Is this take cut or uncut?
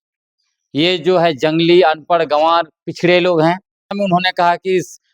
cut